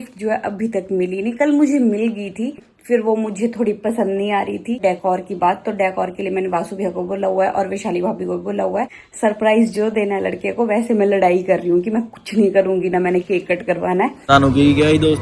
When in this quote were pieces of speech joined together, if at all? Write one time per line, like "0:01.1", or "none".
0:02.7
0:04.8
0:09.0
0:14.3